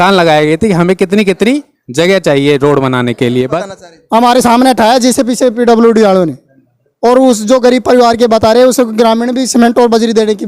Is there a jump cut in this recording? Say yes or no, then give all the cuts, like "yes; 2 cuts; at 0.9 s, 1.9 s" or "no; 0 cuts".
yes; 1 cut; at 3.6 s